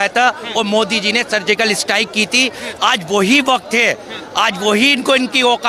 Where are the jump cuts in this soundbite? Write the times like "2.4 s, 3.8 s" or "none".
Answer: none